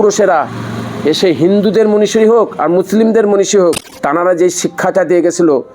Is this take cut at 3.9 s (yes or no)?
yes